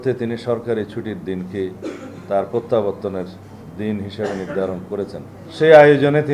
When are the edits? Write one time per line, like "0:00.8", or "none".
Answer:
0:05.4

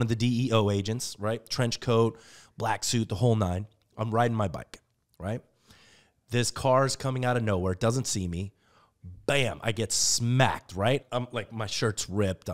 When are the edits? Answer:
0:11.0

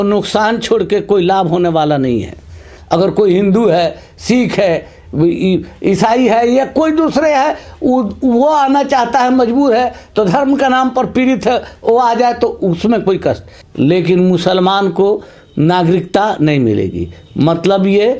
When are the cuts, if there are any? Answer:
0:02.7
0:13.5

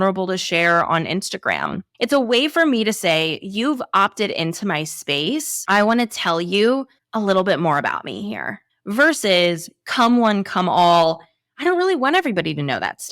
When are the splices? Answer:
0:05.5

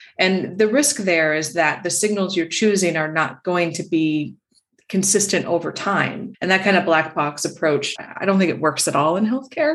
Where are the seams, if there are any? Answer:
0:06.2
0:08.0

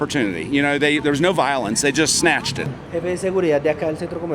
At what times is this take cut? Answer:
0:02.8

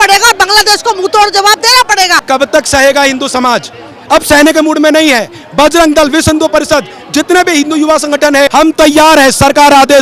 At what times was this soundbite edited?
0:02.2
0:08.5

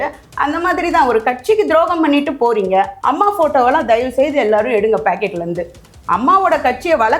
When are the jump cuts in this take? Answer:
0:02.9

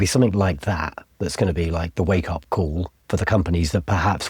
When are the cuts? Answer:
0:02.9

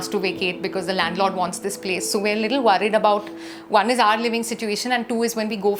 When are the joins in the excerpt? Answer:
none

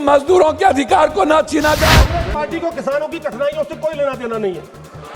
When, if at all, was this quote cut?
0:02.1

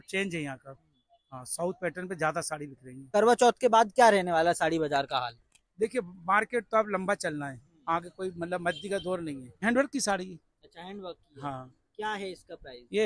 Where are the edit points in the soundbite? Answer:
0:03.1
0:09.6

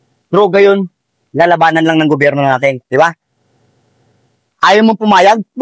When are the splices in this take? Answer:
none

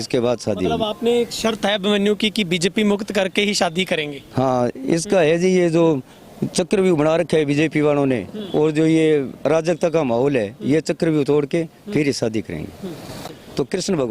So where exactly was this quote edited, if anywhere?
0:13.2

